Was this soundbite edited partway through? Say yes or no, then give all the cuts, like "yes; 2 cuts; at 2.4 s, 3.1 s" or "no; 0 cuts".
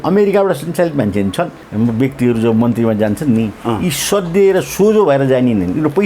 yes; 1 cut; at 1.6 s